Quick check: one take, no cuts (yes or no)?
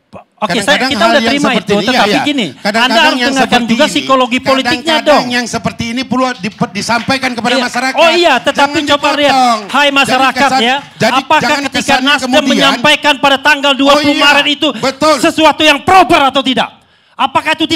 yes